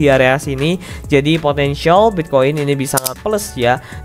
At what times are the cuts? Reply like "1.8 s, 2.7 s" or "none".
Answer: 3.1 s